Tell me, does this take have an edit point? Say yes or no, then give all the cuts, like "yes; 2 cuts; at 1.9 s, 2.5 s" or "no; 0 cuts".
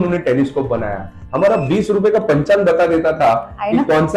no; 0 cuts